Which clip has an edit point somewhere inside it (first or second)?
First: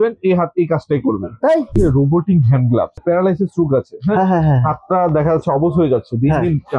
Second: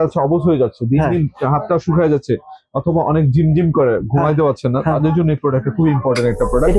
first